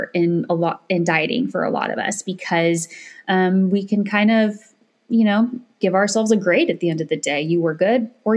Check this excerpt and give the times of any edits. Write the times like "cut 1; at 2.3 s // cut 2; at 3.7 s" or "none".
none